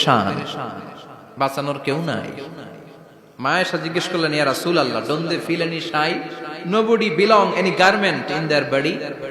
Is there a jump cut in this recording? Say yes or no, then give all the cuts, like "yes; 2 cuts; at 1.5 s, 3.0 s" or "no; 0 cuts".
no; 0 cuts